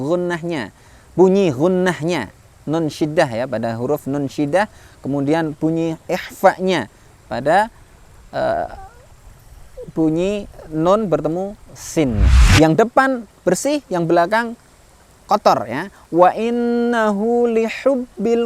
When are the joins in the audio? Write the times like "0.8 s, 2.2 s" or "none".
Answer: 12.4 s